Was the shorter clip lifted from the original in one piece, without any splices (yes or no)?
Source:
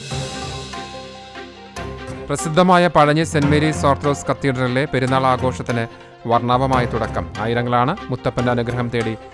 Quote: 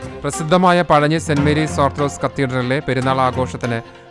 yes